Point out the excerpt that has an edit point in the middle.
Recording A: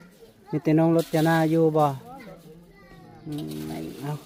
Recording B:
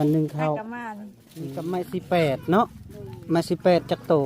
B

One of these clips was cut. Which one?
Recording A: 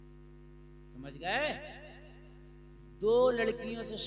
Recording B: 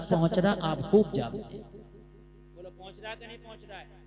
A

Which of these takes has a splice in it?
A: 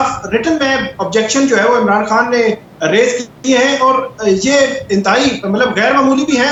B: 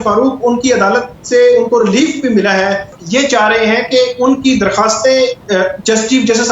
B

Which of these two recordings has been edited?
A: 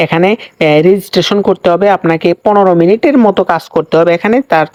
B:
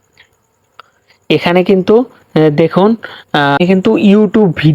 B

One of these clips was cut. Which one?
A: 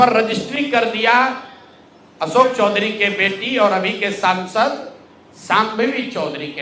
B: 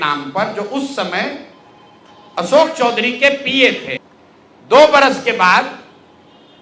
B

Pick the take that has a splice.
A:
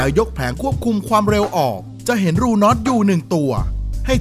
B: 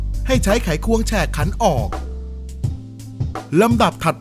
B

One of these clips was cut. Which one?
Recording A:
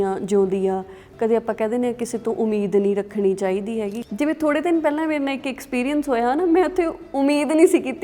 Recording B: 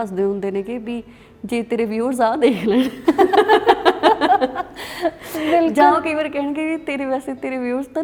A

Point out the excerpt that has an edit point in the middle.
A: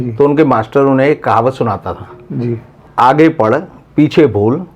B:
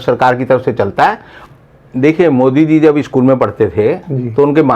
B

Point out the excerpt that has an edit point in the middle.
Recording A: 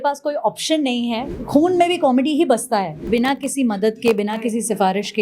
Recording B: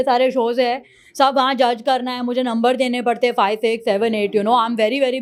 A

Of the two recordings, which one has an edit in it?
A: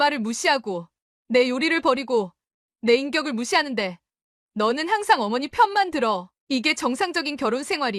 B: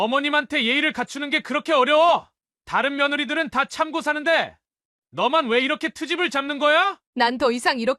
B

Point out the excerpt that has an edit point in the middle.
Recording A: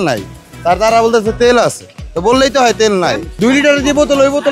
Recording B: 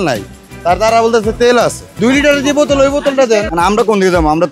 B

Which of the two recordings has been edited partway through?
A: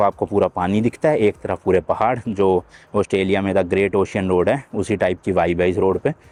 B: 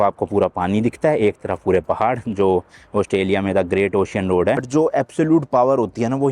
B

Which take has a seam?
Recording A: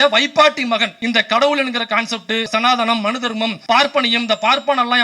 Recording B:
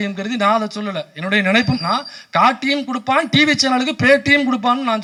A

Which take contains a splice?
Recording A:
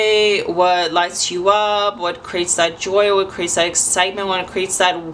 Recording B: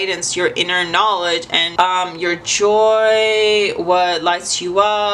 B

